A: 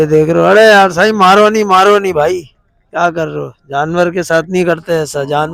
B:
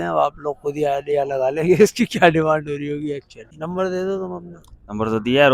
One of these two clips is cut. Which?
B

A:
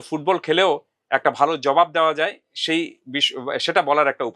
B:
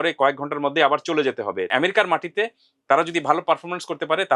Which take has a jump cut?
B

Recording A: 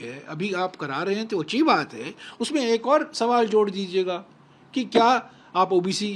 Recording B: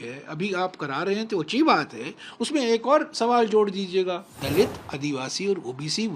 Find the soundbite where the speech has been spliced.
B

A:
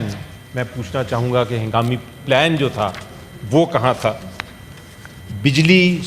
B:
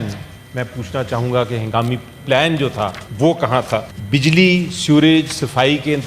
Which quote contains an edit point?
B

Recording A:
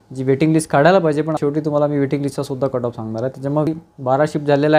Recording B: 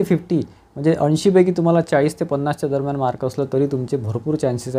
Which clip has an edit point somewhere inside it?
A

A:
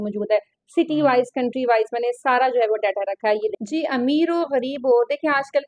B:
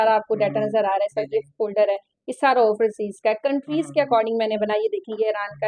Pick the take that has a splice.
A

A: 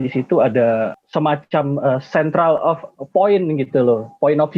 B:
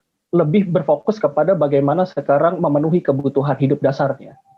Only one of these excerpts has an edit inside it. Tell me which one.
A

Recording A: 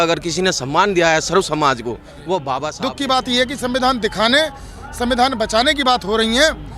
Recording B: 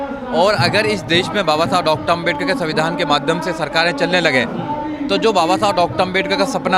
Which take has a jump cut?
A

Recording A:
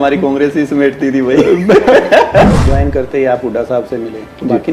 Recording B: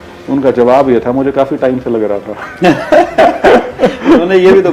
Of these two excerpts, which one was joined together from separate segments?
A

